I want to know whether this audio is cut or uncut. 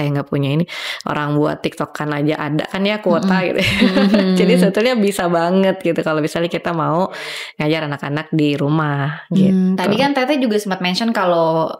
uncut